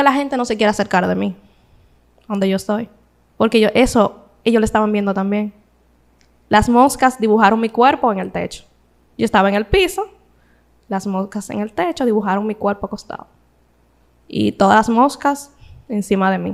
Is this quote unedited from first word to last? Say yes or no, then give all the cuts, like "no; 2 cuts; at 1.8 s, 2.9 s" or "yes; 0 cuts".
yes; 0 cuts